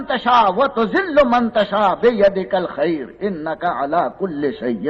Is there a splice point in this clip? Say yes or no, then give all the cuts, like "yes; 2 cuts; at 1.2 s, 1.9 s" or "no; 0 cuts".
no; 0 cuts